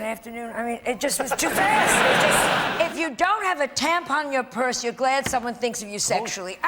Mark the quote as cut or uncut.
cut